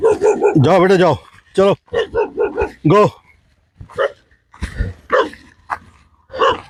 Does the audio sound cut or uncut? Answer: uncut